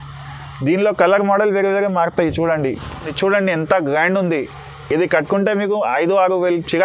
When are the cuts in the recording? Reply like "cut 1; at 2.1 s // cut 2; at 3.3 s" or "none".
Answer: cut 1; at 3.1 s

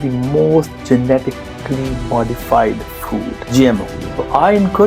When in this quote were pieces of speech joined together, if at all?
cut 1; at 3.4 s // cut 2; at 4.0 s

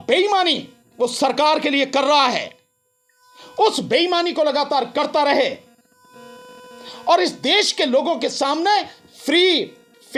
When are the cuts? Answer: none

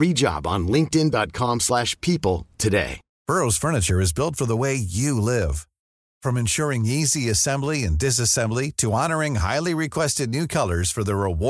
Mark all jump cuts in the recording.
cut 1; at 3.1 s

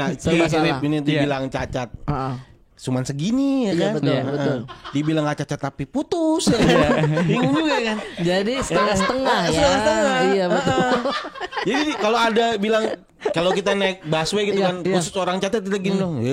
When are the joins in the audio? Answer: none

